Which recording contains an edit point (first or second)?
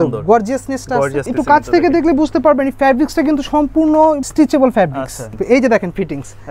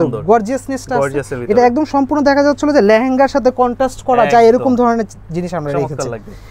first